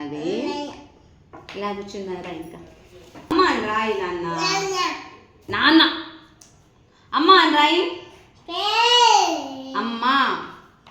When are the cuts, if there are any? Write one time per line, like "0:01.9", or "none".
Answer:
0:03.3